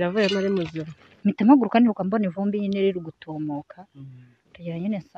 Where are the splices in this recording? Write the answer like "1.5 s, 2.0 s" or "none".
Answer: 1.1 s